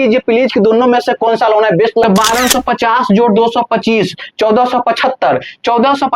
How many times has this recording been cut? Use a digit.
1